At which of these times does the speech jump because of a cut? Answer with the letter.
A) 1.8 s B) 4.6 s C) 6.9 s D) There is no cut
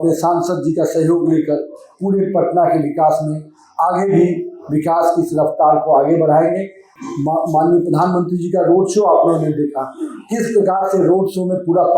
C